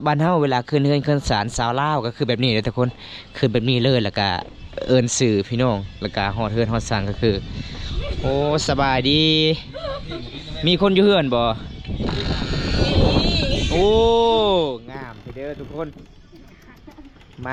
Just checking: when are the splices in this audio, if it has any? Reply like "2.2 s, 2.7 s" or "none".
none